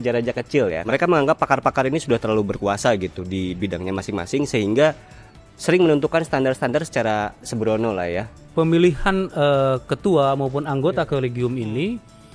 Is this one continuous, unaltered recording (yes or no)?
no